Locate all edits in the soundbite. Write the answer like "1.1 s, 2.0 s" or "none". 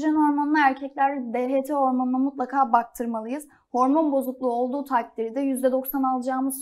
none